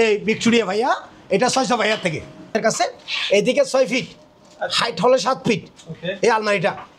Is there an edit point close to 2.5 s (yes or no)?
yes